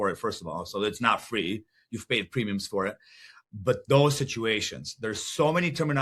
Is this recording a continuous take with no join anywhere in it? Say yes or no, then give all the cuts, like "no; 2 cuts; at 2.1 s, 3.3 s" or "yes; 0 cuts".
yes; 0 cuts